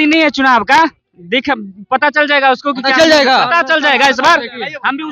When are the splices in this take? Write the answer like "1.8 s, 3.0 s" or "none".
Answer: none